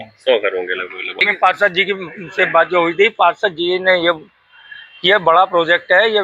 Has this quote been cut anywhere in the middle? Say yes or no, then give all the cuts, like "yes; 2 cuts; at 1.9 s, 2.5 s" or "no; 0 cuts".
yes; 1 cut; at 1.2 s